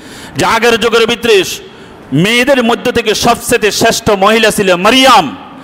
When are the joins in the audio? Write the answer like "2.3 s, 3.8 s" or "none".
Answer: none